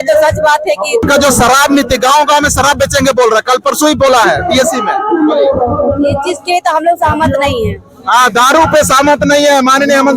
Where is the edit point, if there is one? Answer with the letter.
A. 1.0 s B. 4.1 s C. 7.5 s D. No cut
A